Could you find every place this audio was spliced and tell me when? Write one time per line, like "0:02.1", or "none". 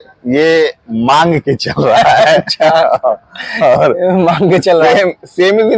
none